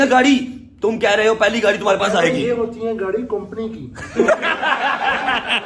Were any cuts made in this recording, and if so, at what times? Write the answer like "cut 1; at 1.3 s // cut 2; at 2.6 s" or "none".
cut 1; at 4.7 s